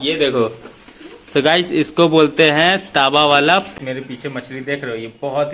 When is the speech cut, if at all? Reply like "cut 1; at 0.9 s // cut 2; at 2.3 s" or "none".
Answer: cut 1; at 3.7 s